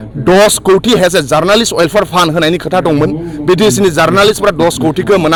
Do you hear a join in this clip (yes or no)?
no